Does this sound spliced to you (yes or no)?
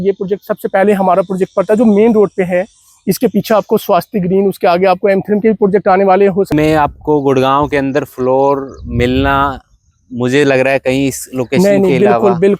yes